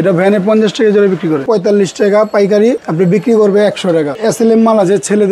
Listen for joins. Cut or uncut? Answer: cut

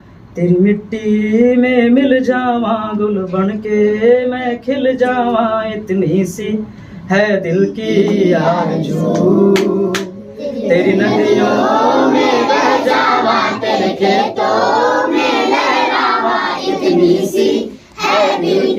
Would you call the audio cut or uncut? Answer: uncut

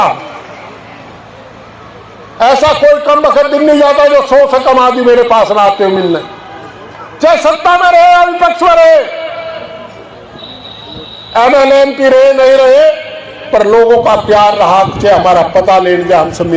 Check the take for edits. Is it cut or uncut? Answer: uncut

